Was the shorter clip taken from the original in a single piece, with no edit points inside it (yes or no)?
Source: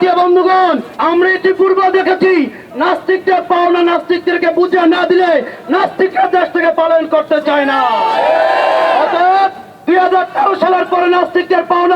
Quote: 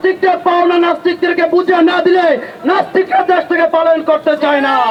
yes